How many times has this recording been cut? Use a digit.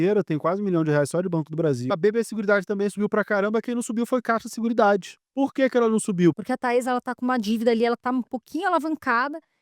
3